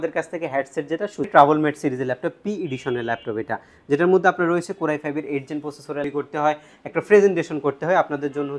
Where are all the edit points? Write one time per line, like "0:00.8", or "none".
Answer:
0:01.3
0:06.0